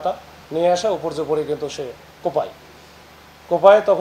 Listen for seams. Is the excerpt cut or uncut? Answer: uncut